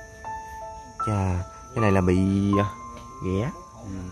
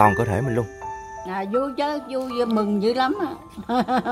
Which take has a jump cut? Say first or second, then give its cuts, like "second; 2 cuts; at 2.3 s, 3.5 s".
second; 1 cut; at 1.2 s